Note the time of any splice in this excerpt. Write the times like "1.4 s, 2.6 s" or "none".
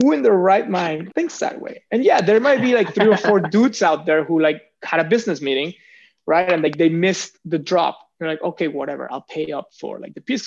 1.0 s